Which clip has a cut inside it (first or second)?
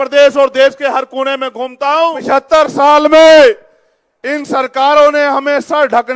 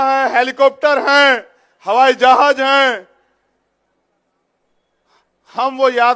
first